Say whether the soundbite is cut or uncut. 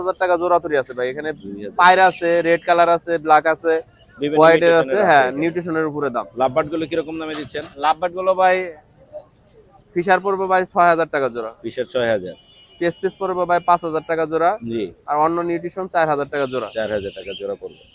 uncut